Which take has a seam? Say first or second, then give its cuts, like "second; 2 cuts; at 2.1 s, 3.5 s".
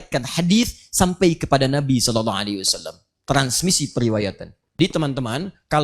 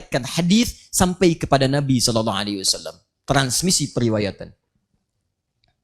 first; 1 cut; at 4.8 s